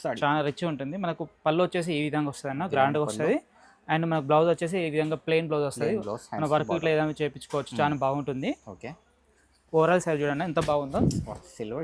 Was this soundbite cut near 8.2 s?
no; 0 cuts

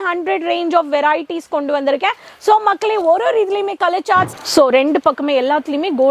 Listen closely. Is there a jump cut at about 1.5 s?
no; 1 cut; at 4.4 s

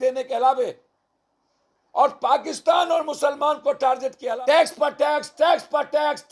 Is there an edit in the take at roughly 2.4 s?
no; 1 cut; at 4.3 s

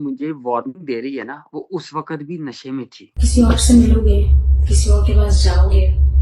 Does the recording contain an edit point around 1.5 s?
no; 1 cut; at 3.2 s

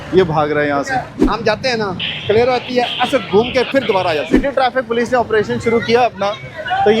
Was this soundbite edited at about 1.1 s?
yes; 2 cuts; at 1.1 s, 4.3 s

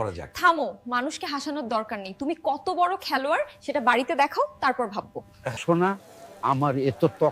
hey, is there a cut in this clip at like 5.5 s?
yes; 1 cut; at 5.5 s

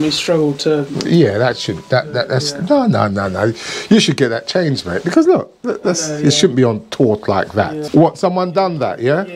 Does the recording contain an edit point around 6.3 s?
no; 1 cut; at 7.8 s

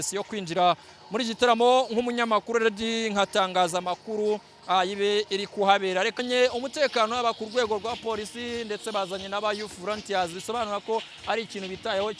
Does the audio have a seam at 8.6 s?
no; 1 cut; at 6.2 s

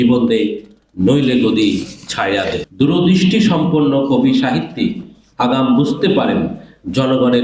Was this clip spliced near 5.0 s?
no; 1 cut; at 2.6 s

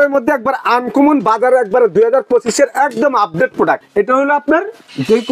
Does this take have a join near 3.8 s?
yes; 1 cut; at 3.8 s

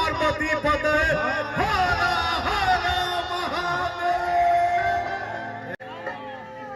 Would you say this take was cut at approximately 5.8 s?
yes; 1 cut; at 5.8 s

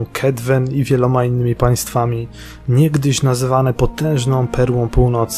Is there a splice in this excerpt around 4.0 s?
no; 1 cut; at 2.3 s

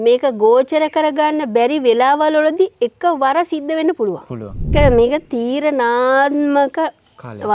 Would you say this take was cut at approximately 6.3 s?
no; 1 cut; at 4.7 s

